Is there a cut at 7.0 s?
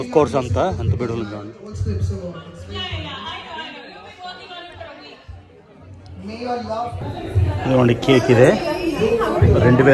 yes; 1 cut; at 7.0 s

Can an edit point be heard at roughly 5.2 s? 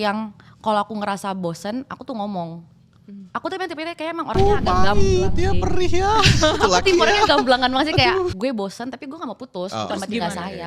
no; 1 cut; at 8.3 s

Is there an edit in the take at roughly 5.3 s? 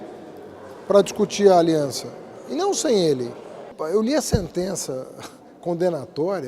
no; 1 cut; at 3.7 s

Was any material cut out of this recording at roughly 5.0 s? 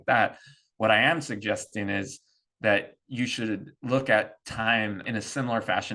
yes; 1 cut; at 5.0 s

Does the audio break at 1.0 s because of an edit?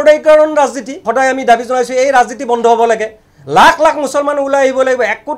yes; 1 cut; at 1.0 s

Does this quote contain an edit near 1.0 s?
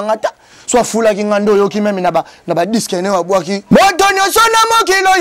no; 1 cut; at 3.6 s

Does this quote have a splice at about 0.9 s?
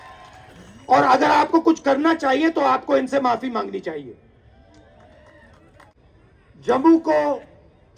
no; 1 cut; at 5.9 s

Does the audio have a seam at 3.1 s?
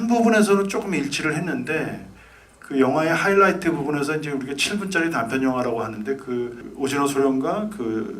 no; 1 cut; at 6.6 s

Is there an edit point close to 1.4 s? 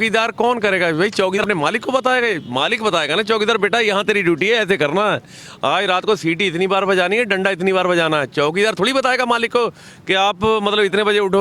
yes; 1 cut; at 1.4 s

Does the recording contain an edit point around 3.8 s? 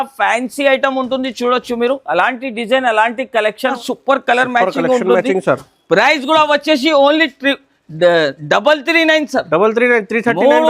yes; 1 cut; at 3.8 s

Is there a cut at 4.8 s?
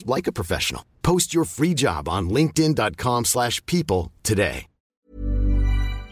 yes; 1 cut; at 4.8 s

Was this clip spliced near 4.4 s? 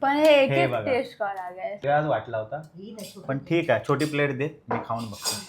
no; 1 cut; at 1.8 s

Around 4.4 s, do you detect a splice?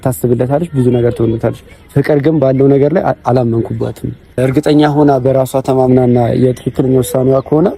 yes; 1 cut; at 4.4 s

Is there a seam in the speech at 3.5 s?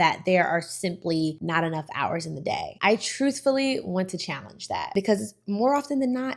no; 2 cuts; at 1.4 s, 4.9 s

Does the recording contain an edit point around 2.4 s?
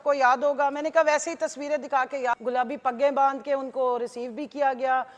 yes; 1 cut; at 2.4 s

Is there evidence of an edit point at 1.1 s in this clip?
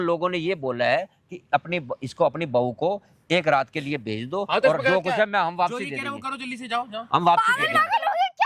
no; 0 cuts

